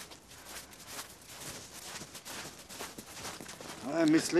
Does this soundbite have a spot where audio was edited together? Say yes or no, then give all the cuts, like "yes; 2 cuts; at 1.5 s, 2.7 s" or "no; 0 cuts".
yes; 1 cut; at 1.0 s